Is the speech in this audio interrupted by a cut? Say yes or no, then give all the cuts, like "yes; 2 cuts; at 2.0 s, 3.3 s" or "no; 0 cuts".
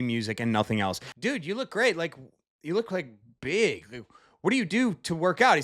yes; 1 cut; at 1.1 s